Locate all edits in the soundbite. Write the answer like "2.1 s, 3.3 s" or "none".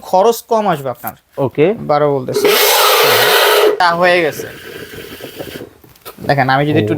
3.8 s